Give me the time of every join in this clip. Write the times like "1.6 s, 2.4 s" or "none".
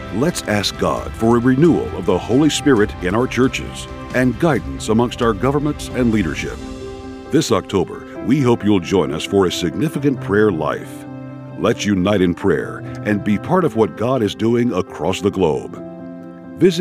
none

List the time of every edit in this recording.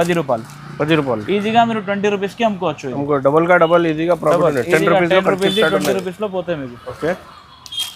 none

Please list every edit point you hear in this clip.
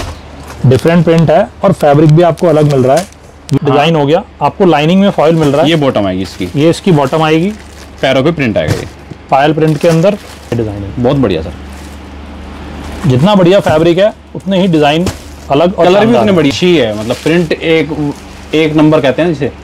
3.5 s, 10.5 s, 16.5 s

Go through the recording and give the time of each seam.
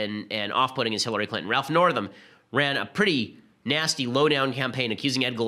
2.0 s

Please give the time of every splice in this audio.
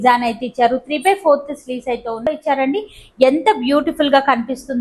2.3 s

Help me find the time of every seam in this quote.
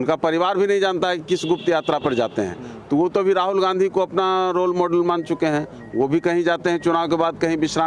none

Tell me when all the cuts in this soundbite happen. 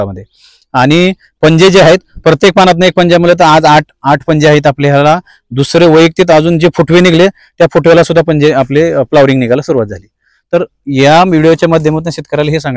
none

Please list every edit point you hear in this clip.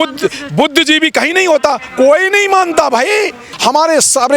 3.4 s

